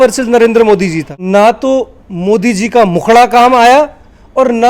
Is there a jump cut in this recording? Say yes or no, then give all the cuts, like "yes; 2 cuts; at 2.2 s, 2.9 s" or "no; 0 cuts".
yes; 1 cut; at 1.1 s